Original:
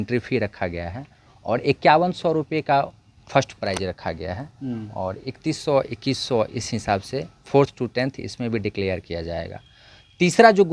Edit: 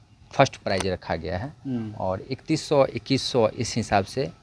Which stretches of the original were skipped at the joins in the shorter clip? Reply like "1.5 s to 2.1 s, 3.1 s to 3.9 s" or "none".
none